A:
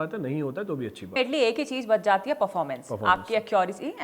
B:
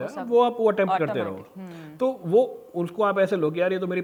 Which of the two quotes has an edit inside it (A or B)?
A